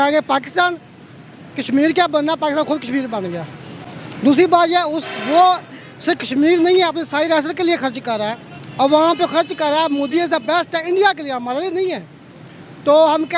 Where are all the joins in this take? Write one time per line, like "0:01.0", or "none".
none